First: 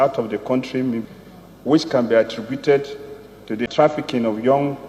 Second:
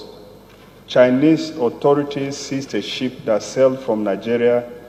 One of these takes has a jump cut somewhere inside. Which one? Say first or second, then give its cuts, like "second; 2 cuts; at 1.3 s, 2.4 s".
first; 2 cuts; at 1.1 s, 3.7 s